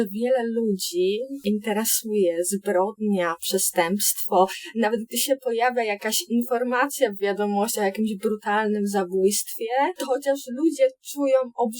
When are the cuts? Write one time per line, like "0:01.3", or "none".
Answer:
0:01.3